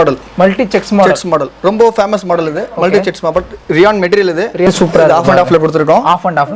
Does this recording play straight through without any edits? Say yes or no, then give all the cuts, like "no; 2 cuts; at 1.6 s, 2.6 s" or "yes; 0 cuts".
no; 1 cut; at 4.7 s